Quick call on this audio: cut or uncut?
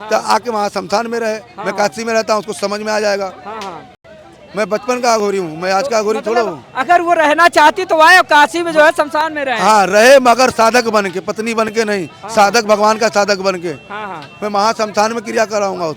uncut